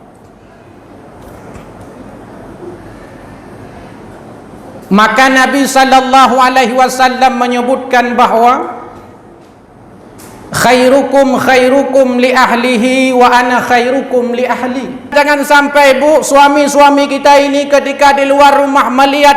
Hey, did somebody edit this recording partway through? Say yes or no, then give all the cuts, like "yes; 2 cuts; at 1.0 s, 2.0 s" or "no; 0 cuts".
yes; 1 cut; at 15.1 s